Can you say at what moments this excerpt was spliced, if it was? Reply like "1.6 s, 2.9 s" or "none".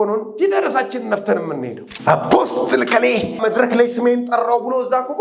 1.8 s, 3.4 s